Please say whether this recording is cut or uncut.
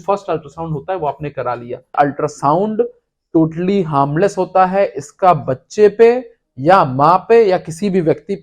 cut